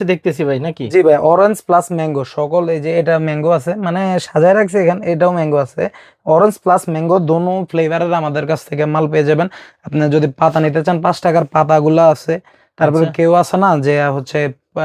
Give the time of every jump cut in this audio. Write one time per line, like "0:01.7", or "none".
none